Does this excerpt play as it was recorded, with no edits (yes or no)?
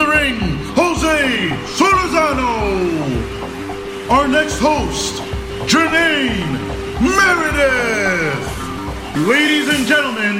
no